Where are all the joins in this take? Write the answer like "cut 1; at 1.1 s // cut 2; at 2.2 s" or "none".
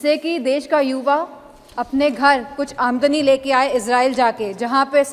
none